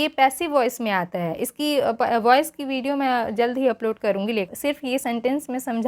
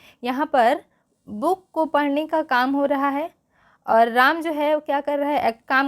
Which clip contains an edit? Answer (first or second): first